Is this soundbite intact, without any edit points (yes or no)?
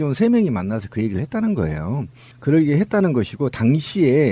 yes